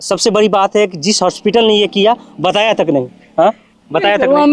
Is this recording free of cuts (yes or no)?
yes